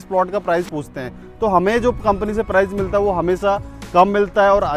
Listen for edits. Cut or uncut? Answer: uncut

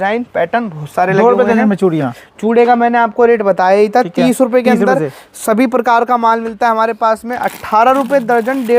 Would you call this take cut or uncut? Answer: uncut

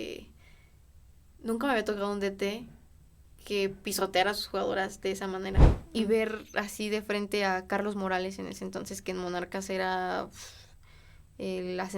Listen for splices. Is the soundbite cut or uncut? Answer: cut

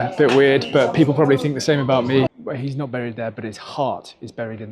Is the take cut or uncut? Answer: cut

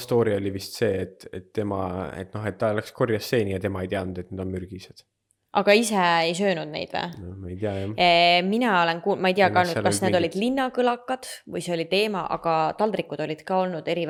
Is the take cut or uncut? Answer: uncut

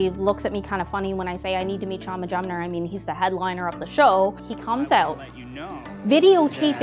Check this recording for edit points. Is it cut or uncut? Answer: cut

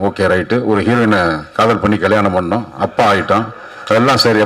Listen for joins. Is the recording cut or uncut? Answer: uncut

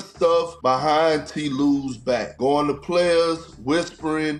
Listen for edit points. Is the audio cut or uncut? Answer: uncut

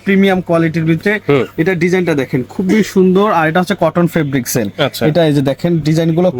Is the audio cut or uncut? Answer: uncut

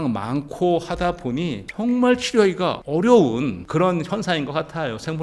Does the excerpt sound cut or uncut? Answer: uncut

